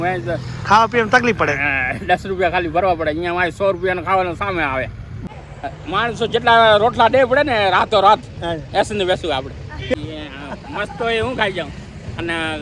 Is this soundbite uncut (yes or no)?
no